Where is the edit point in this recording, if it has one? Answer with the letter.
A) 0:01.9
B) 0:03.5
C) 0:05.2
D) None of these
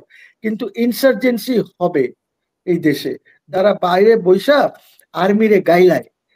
B